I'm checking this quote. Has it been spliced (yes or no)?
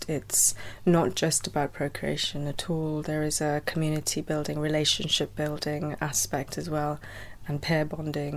no